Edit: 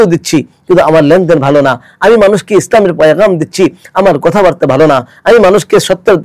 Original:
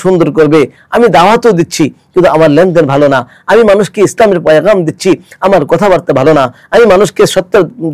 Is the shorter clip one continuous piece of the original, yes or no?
yes